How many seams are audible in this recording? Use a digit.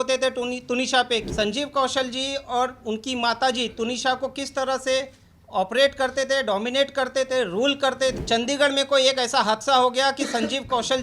2